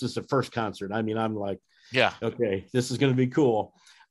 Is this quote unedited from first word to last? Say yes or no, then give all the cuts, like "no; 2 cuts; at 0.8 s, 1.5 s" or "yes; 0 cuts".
yes; 0 cuts